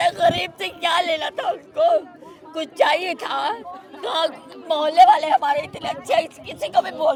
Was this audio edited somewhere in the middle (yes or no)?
no